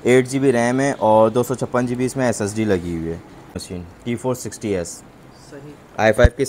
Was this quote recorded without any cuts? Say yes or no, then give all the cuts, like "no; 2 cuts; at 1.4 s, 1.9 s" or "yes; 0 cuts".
no; 1 cut; at 3.7 s